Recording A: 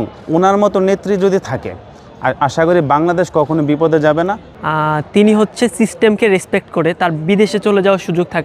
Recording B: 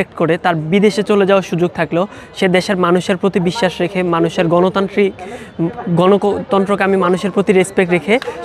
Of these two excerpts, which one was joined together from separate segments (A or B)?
A